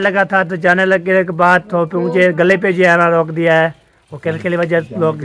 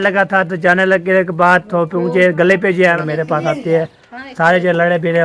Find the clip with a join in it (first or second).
second